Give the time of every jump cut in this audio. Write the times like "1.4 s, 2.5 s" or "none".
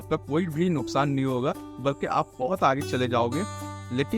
1.7 s